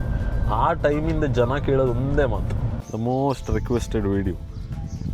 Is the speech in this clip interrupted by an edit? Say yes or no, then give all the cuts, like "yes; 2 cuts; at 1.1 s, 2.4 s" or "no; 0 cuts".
yes; 1 cut; at 2.8 s